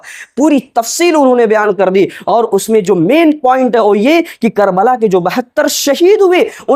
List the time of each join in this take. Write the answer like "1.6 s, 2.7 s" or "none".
none